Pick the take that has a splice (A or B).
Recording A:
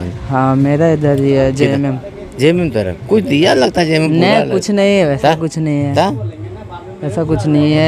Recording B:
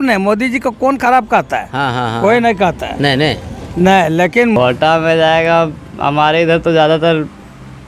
B